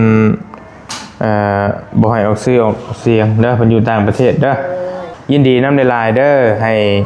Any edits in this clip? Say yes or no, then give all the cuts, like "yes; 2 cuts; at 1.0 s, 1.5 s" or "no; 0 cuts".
yes; 1 cut; at 5.0 s